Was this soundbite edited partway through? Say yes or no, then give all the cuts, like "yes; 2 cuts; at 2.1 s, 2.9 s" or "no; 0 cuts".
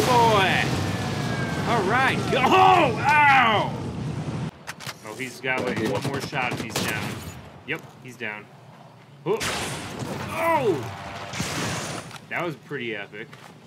yes; 1 cut; at 4.5 s